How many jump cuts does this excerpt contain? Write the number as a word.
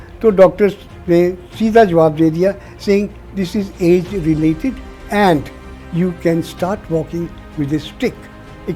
zero